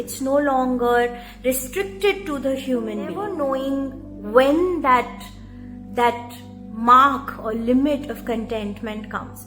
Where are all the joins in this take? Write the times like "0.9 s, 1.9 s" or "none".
3.3 s